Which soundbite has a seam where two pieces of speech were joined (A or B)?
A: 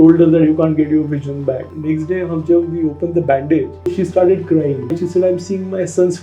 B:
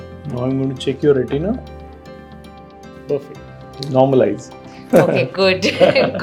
A